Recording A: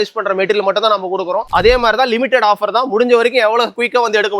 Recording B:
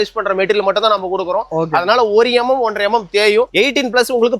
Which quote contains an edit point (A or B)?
A